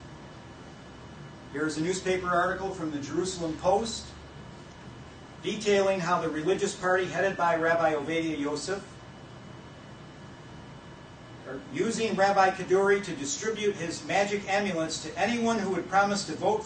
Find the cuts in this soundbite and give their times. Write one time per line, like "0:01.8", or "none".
0:14.7